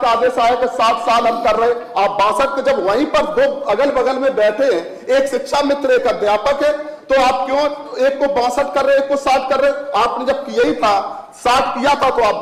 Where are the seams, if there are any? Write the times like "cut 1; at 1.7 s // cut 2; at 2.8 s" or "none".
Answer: none